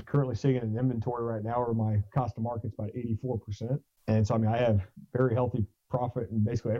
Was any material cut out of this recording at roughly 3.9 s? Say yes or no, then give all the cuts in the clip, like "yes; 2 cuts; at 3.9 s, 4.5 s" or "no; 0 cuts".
yes; 1 cut; at 3.9 s